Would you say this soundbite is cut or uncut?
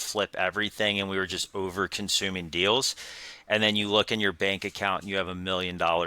cut